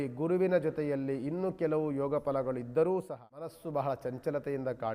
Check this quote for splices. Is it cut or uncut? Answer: cut